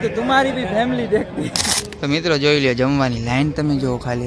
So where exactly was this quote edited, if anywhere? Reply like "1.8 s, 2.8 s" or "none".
1.8 s